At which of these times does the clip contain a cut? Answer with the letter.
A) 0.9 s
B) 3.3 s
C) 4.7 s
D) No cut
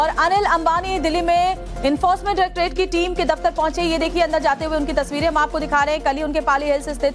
D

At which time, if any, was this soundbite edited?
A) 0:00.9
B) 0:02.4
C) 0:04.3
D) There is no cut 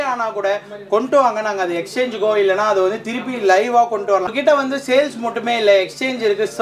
C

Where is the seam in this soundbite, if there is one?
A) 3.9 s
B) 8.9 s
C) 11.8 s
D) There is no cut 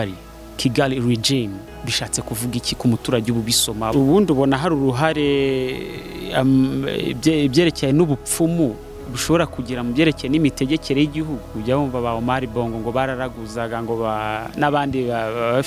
A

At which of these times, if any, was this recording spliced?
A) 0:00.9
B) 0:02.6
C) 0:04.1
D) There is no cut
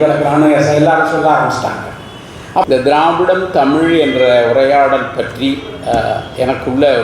B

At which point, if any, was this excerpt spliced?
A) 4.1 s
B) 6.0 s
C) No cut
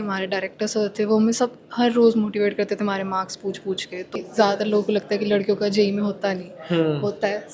A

